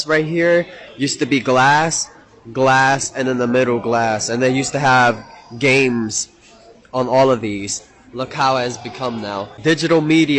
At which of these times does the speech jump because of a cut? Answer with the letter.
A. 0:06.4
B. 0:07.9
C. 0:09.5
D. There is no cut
C